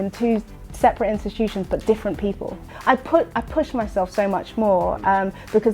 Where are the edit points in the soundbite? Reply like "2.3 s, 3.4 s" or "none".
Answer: 2.7 s

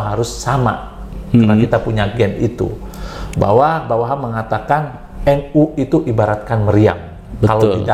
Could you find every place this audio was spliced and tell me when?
none

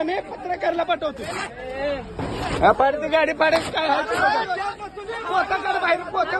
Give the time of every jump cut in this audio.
1.6 s

